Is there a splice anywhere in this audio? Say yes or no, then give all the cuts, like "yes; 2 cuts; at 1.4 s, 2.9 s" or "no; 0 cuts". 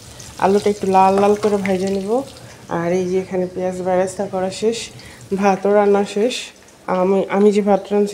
no; 0 cuts